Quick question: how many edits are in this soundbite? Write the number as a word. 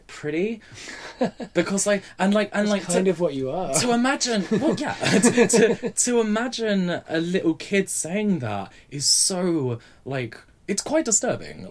zero